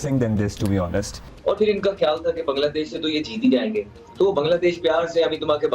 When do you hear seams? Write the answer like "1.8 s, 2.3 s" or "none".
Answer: none